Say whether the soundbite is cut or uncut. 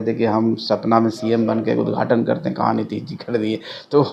uncut